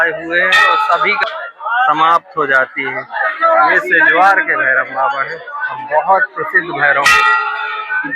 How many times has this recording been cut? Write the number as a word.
one